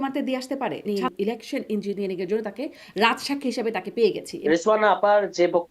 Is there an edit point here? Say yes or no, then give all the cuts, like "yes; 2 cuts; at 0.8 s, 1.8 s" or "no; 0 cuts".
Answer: yes; 2 cuts; at 0.9 s, 4.3 s